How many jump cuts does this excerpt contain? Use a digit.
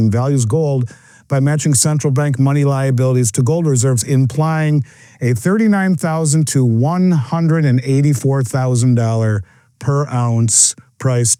0